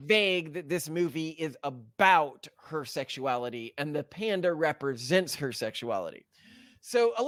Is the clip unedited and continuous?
yes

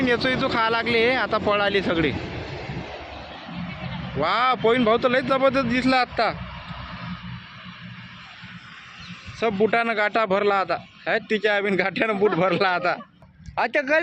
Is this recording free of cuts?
no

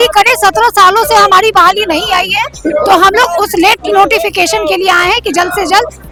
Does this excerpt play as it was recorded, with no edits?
yes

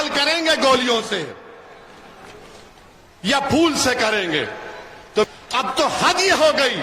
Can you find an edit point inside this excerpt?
yes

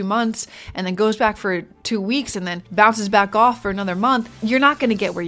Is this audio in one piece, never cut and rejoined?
no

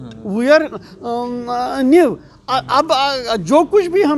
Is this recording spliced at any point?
no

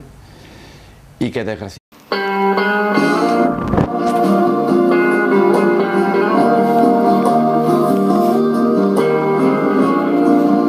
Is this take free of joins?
yes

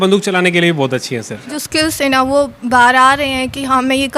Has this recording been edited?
yes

